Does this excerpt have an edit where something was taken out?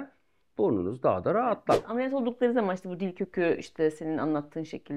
yes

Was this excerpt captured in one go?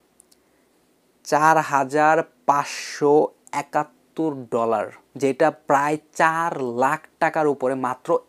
no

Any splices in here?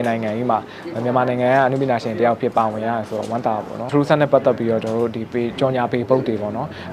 yes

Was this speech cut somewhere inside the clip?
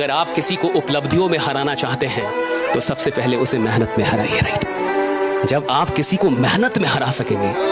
no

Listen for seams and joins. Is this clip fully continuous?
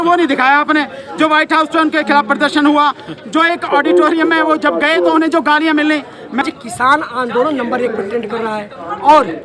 no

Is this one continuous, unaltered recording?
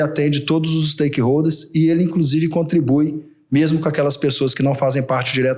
yes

